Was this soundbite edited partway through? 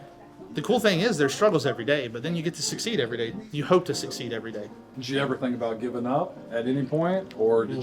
yes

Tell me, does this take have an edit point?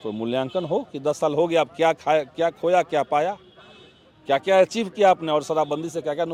no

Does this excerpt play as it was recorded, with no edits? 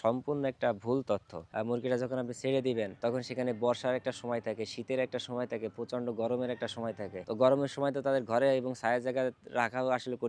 no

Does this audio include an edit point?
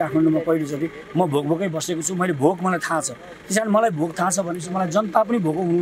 no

